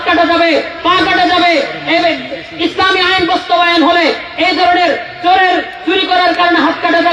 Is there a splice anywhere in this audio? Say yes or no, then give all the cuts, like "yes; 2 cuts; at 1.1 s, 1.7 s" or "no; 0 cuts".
no; 0 cuts